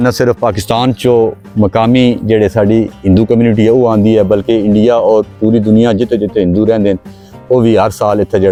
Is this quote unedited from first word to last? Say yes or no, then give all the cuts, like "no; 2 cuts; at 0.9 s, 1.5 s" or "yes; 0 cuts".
yes; 0 cuts